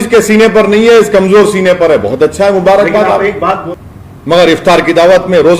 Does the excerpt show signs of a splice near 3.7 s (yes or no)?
yes